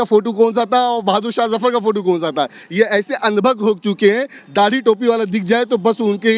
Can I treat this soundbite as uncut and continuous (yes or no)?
yes